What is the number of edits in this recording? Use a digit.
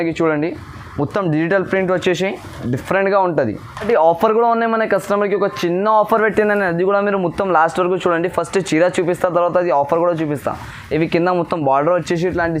1